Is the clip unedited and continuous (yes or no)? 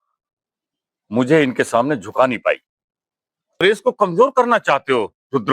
no